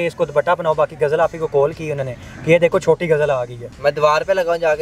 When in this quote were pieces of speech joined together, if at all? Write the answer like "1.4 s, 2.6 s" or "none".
3.7 s